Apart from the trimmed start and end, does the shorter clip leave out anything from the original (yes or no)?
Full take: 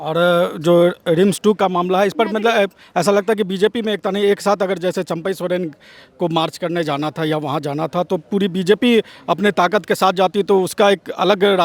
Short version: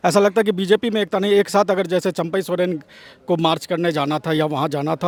no